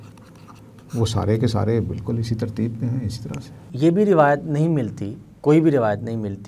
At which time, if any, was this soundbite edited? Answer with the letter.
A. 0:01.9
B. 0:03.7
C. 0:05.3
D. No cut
B